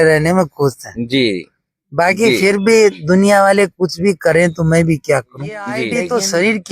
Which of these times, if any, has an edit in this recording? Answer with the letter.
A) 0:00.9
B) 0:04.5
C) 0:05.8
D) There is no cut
C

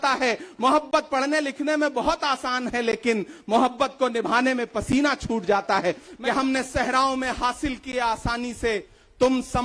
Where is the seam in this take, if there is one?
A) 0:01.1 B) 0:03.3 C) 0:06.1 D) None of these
C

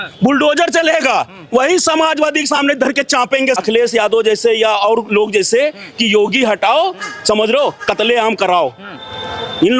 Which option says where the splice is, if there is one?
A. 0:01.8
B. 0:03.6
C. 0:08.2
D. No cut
B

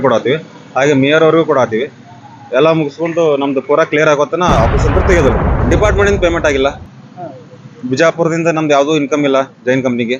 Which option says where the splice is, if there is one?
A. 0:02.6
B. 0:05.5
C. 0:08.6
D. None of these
B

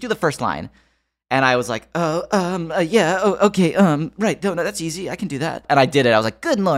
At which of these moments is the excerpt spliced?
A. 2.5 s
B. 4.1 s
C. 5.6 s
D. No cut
C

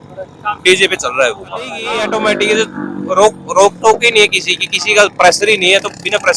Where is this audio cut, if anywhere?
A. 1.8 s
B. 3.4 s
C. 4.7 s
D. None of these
A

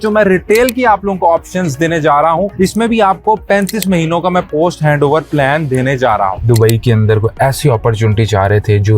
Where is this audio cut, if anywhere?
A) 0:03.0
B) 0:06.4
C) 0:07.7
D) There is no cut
B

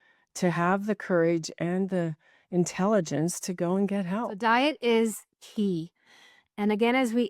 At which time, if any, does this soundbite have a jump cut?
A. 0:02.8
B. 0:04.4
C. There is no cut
B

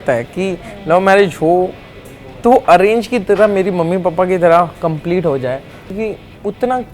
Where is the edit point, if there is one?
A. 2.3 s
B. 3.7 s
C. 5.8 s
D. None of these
C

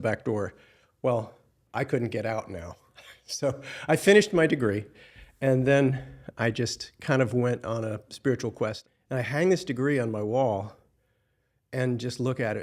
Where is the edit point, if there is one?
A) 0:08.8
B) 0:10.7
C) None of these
A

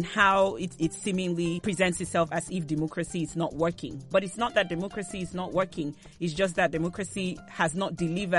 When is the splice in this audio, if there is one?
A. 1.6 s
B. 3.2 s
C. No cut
A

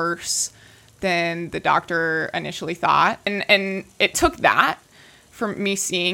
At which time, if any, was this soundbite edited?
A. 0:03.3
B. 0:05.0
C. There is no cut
A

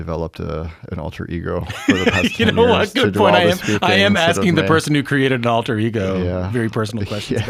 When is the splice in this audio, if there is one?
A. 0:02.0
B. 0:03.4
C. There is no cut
C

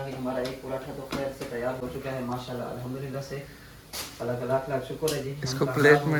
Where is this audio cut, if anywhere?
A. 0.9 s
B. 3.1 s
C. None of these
C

